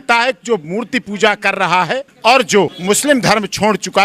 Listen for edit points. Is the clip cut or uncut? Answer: cut